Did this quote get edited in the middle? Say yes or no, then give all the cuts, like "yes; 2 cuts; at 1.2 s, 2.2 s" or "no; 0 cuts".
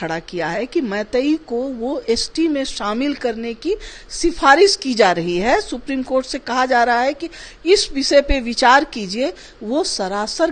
no; 0 cuts